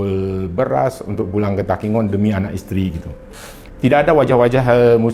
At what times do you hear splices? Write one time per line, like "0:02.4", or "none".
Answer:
0:03.6